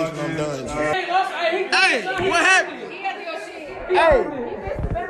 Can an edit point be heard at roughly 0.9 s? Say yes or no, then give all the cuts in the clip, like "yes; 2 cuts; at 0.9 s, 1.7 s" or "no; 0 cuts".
yes; 1 cut; at 0.9 s